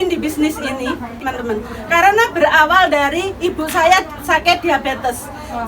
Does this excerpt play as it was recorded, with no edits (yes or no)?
no